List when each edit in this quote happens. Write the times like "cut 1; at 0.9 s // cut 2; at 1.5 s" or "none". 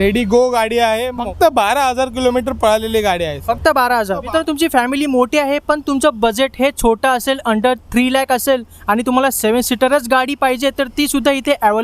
cut 1; at 1.2 s // cut 2; at 4.3 s